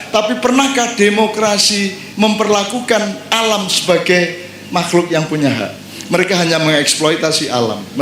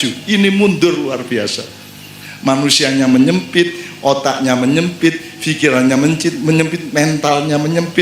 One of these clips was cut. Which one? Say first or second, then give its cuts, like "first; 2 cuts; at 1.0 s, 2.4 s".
first; 1 cut; at 2.0 s